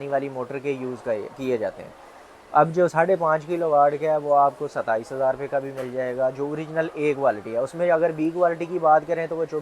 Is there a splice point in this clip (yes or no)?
no